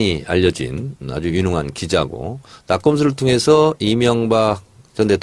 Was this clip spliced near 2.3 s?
no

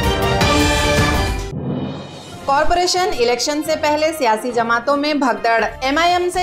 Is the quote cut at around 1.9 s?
no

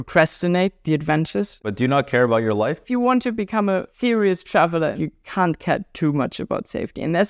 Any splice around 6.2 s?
no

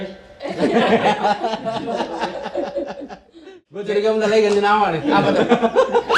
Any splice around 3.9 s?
yes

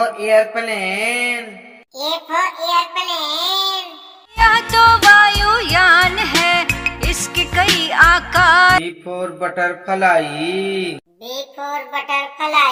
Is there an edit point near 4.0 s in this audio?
no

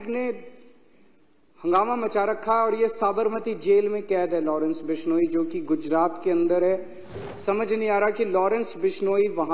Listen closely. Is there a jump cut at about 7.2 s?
yes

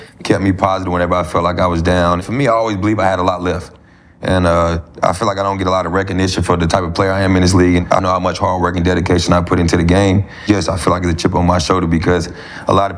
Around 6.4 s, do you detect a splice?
no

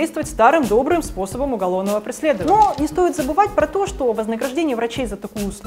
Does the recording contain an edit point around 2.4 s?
yes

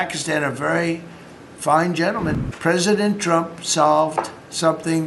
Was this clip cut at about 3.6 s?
no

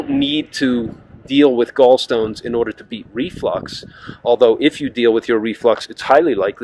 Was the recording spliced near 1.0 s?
no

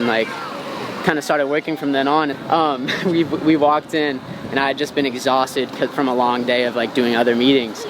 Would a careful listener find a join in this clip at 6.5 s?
no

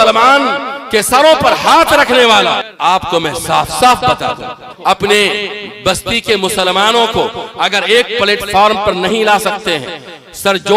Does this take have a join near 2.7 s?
yes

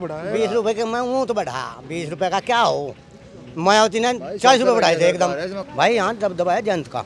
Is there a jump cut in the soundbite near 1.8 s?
no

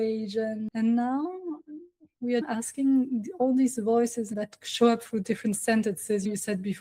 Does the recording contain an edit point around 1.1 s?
no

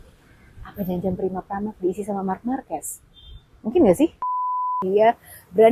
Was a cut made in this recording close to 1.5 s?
no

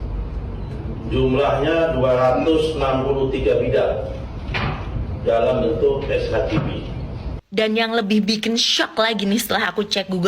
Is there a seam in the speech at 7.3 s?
yes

